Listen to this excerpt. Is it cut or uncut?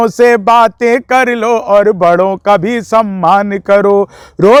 uncut